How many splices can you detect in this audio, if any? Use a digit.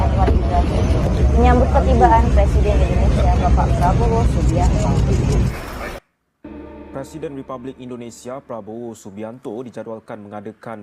1